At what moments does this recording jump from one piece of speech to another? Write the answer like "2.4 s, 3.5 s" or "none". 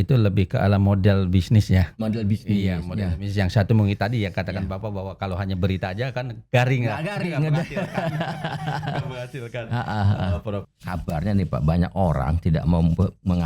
10.7 s